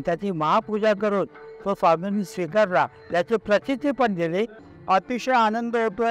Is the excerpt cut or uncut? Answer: cut